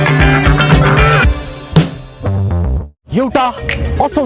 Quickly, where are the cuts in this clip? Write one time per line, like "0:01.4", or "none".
none